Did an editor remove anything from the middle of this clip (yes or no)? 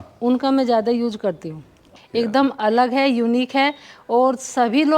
yes